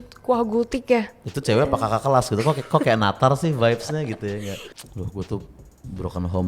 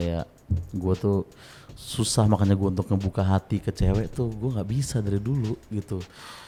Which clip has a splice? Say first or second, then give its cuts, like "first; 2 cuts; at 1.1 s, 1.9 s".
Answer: first; 2 cuts; at 1.2 s, 4.7 s